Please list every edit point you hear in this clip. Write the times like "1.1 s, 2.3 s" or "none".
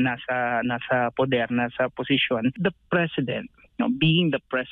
2.6 s

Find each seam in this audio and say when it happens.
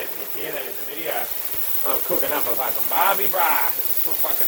none

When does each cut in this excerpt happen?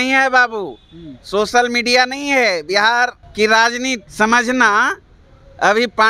3.2 s, 4.1 s

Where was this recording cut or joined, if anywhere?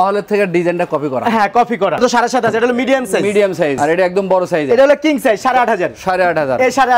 2.0 s, 3.8 s

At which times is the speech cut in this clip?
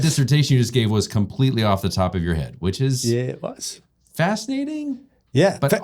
none

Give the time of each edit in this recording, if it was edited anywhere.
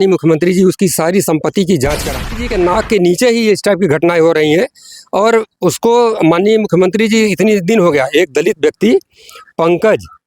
2.2 s

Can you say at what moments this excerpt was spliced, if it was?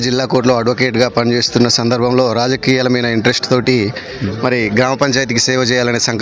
none

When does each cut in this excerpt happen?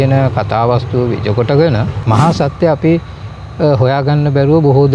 1.9 s

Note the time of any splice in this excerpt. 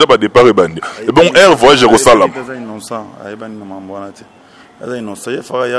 none

